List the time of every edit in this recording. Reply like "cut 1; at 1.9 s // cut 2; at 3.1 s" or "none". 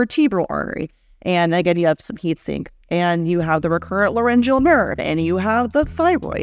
none